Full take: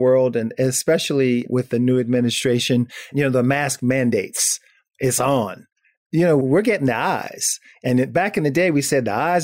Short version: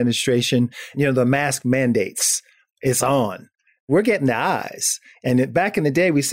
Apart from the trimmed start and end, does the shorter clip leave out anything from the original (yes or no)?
yes